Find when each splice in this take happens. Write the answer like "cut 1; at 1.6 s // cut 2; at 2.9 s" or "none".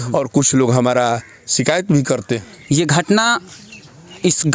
cut 1; at 2.5 s